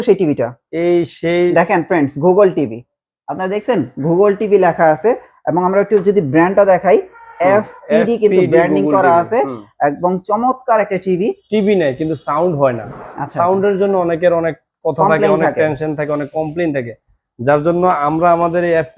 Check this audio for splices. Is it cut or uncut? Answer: cut